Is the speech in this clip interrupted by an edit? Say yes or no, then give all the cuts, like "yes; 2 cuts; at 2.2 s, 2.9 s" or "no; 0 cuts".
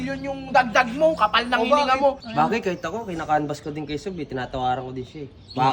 yes; 1 cut; at 2.2 s